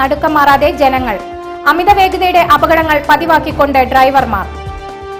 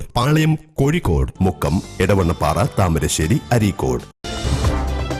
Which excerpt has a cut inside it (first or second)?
second